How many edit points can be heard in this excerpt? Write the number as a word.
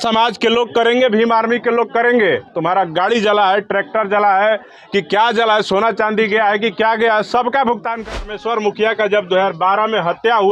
one